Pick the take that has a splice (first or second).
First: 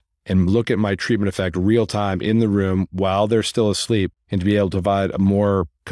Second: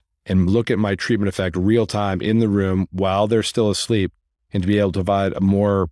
first